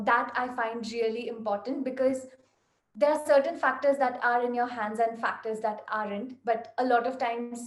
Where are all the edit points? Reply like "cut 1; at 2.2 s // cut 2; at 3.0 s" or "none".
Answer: none